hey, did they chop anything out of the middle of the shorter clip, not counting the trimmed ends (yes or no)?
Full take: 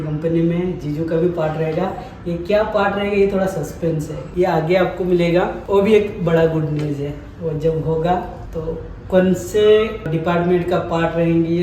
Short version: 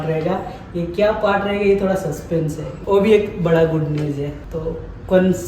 yes